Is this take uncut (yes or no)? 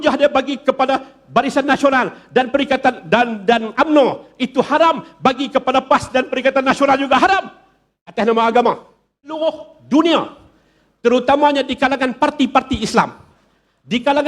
no